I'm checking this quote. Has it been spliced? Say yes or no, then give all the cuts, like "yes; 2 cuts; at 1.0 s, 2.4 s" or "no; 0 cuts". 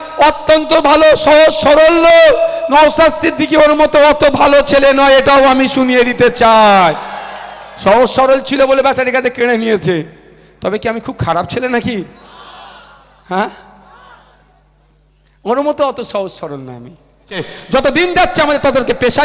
yes; 1 cut; at 17.5 s